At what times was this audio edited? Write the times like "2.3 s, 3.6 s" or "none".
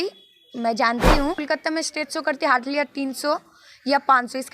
1.4 s